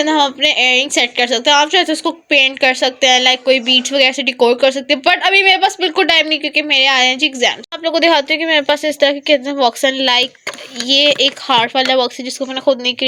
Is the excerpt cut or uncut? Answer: uncut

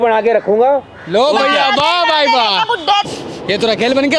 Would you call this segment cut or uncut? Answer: cut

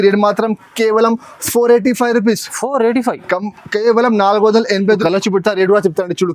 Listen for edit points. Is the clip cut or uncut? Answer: cut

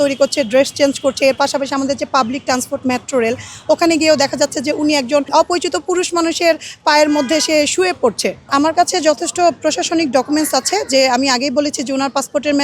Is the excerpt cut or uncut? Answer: cut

